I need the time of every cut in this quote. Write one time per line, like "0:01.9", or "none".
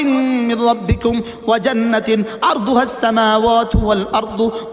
none